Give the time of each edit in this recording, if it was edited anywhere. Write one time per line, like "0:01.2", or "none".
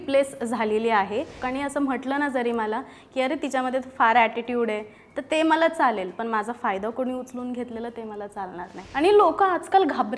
0:01.4
0:08.8